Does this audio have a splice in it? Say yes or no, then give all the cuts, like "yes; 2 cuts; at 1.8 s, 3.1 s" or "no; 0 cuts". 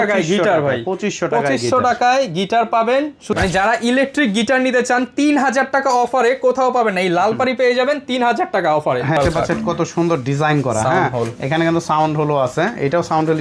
yes; 2 cuts; at 3.3 s, 9.2 s